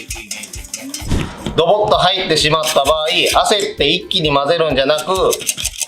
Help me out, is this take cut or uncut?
cut